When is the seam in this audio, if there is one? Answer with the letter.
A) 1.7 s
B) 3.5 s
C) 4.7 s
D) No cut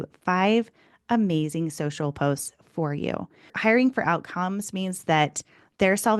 B